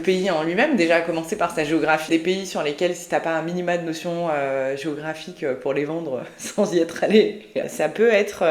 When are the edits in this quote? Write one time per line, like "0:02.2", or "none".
0:02.1
0:07.7